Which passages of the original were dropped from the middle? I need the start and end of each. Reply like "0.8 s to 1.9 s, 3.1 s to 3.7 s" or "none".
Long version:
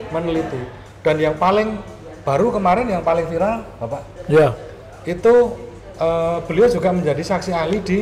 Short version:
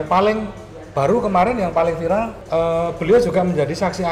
3.7 s to 5.9 s

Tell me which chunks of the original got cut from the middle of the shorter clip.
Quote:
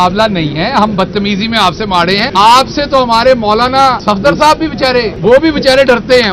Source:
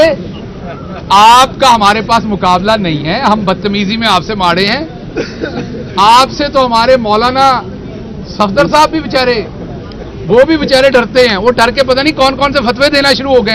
4.8 s to 5.9 s, 7.6 s to 8.3 s, 9.5 s to 10.2 s

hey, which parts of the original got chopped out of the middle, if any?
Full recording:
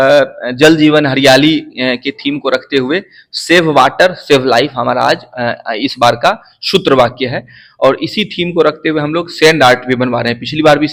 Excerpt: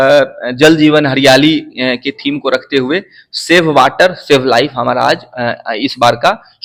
none

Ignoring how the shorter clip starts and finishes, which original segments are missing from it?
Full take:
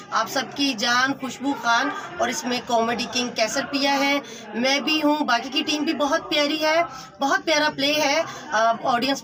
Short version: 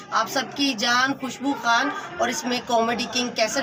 none

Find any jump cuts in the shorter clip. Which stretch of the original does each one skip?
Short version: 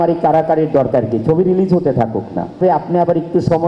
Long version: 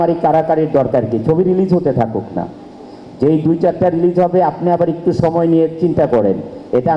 2.6 s to 4.3 s

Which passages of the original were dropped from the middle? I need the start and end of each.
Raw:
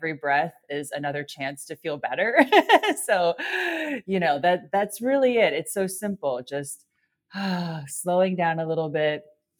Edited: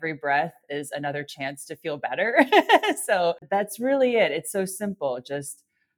3.4 s to 4.6 s

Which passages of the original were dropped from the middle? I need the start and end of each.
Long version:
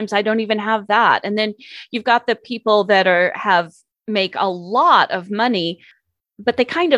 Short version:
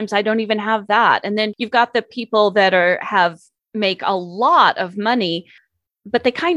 1.6 s to 1.9 s

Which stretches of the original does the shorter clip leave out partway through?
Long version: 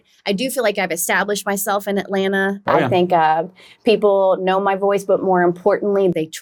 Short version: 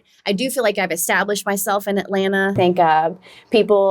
2.6 s to 2.9 s

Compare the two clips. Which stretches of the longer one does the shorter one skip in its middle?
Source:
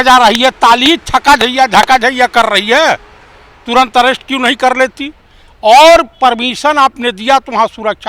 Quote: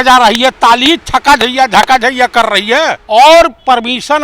3.0 s to 5.5 s

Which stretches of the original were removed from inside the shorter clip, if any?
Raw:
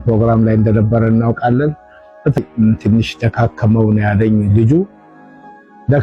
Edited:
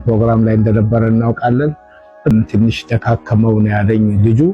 2.3 s to 2.6 s

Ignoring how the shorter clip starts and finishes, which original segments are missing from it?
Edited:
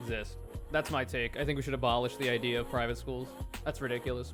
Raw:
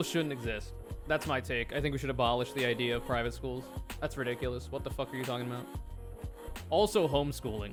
none

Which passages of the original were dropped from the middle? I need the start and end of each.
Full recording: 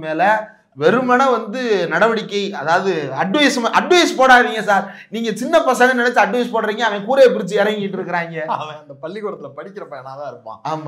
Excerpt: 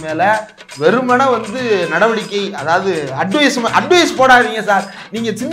none

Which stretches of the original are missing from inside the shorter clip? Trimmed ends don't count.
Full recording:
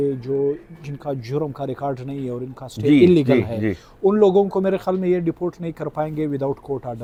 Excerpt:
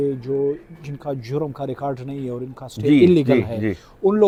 none

